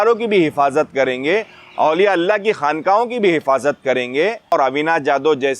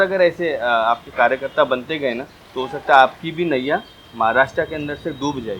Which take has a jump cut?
first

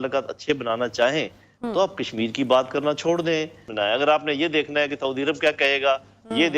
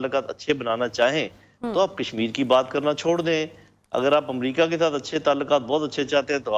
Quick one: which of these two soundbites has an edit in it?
first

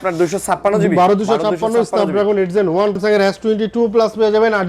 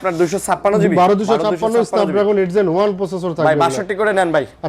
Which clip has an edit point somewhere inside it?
first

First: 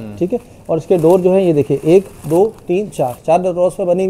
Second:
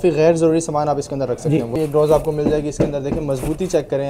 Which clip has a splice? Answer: second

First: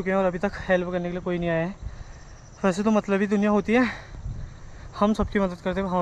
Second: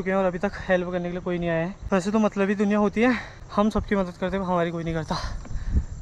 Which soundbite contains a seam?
second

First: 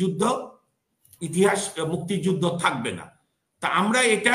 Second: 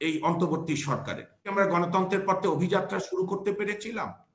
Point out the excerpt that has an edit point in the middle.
second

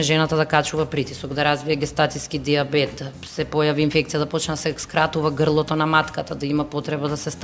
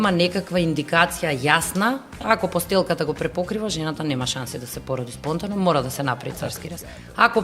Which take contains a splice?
second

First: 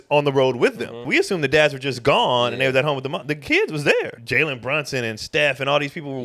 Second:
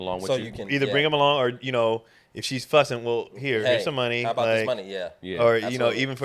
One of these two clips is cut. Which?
first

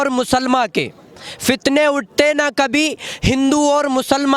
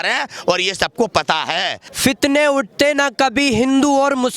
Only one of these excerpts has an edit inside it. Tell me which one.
second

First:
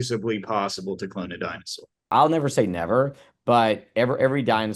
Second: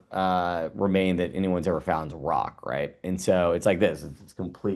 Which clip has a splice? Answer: first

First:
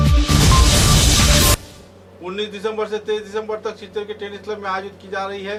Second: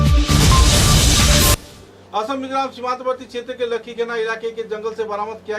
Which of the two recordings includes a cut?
second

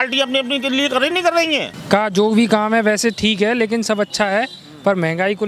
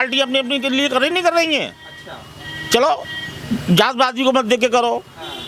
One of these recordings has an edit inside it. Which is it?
first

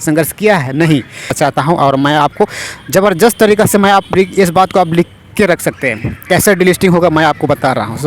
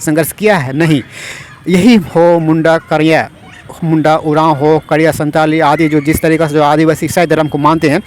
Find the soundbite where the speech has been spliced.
first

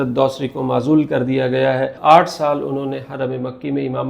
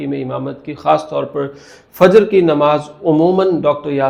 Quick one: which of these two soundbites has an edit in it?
first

